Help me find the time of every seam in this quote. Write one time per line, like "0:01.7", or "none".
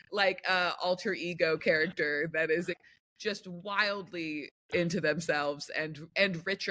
0:02.9